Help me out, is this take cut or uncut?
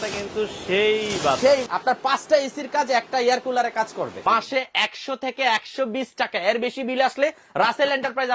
cut